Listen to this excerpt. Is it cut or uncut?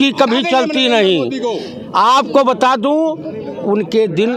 uncut